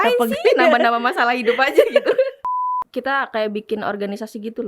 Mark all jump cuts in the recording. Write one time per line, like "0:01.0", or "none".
0:02.4